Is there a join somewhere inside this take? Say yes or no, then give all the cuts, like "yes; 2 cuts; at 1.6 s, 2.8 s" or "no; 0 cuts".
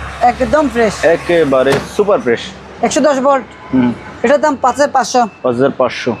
no; 0 cuts